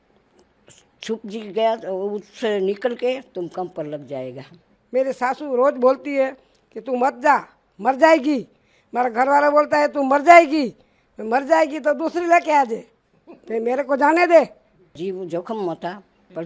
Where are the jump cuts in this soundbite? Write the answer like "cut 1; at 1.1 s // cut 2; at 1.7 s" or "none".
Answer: cut 1; at 4.7 s // cut 2; at 15.0 s